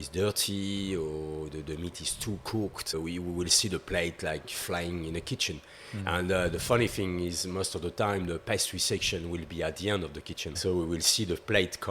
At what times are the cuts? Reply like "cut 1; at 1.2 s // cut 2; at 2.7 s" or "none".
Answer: cut 1; at 10.6 s